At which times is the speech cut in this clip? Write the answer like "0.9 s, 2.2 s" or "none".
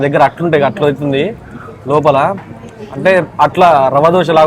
none